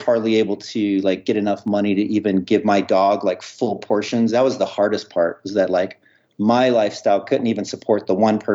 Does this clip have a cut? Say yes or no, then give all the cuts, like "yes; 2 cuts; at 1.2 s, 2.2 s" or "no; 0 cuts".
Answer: no; 0 cuts